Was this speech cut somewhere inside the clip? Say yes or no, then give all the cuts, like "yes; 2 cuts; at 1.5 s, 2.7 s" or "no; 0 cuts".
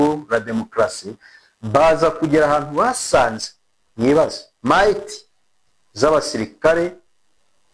no; 0 cuts